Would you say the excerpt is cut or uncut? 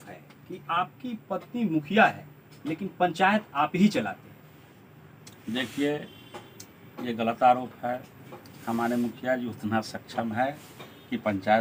uncut